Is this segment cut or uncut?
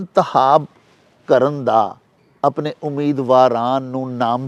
uncut